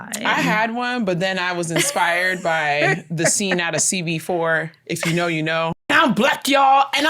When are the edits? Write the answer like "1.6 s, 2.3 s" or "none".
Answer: 5.9 s